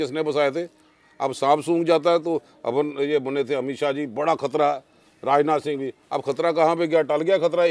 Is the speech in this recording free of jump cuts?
yes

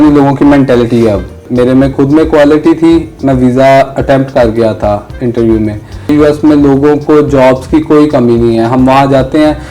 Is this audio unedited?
no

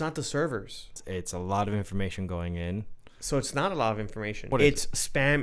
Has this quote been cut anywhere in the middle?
yes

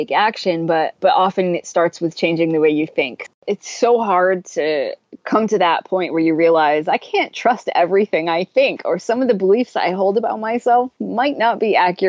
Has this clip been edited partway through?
yes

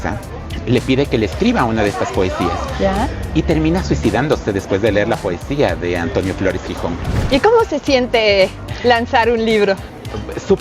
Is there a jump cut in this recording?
yes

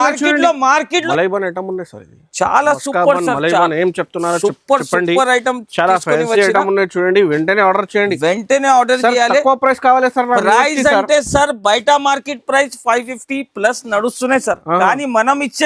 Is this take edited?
yes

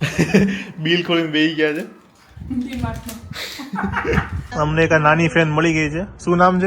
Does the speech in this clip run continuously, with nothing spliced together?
no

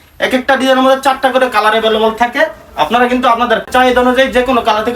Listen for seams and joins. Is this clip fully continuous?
yes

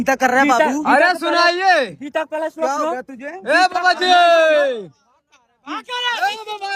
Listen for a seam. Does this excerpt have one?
no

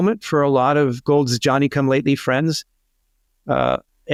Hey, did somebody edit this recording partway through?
no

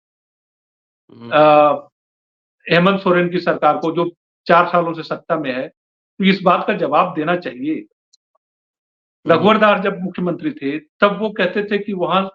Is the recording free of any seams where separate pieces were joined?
yes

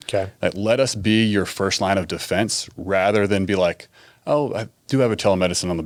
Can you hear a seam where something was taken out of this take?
no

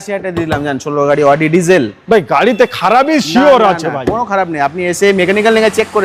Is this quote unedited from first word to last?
yes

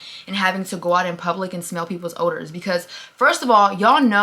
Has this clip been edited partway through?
no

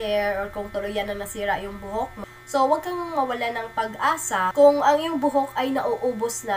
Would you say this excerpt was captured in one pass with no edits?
no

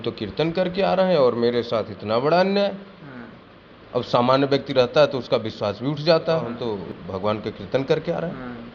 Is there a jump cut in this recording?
no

